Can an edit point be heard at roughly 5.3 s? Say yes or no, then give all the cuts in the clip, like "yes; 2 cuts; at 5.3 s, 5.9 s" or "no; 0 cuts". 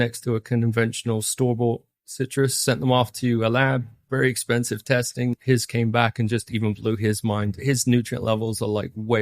yes; 2 cuts; at 5.3 s, 7.6 s